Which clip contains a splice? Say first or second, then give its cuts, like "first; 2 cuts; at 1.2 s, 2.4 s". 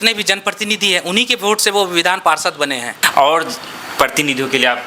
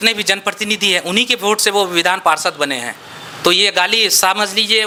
first; 1 cut; at 3.0 s